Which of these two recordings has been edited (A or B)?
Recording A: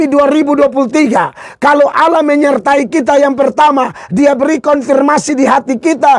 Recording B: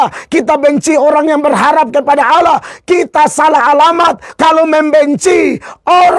B